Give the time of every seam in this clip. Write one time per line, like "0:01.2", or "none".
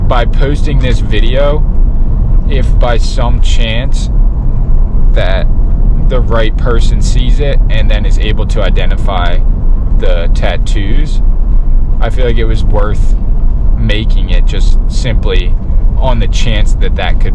none